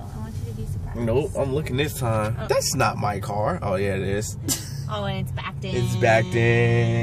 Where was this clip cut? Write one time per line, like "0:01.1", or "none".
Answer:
0:02.4